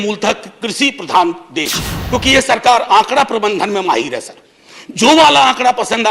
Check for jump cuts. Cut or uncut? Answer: cut